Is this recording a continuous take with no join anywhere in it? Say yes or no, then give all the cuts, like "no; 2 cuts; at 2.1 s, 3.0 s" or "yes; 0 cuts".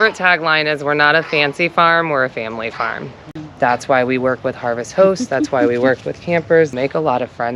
no; 2 cuts; at 3.3 s, 6.7 s